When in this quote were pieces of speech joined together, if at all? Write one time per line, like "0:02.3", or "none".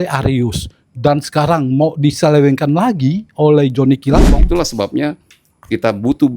0:04.4